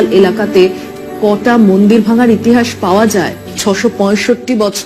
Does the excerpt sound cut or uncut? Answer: cut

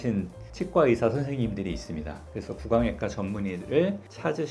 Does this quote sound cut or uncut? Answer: uncut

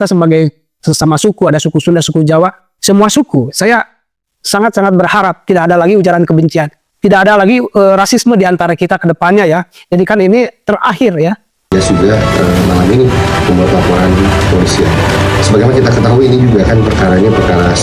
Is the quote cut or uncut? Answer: cut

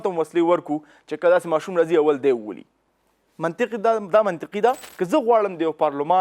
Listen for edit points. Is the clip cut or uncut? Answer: cut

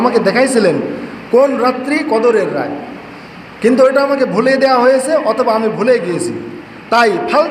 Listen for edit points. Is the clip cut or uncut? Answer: uncut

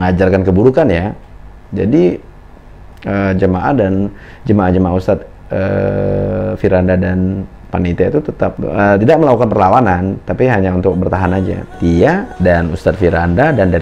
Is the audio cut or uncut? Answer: cut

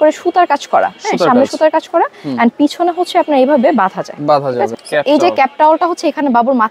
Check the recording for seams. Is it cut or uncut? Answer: cut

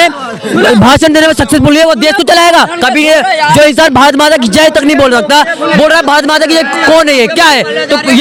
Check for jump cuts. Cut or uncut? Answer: uncut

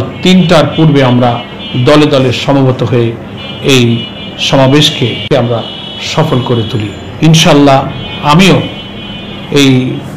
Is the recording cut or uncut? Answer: cut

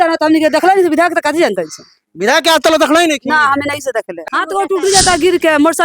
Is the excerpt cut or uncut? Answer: cut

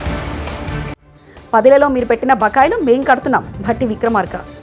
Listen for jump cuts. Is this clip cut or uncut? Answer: cut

